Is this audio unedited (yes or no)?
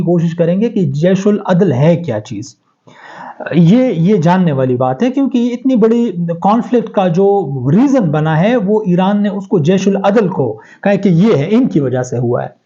yes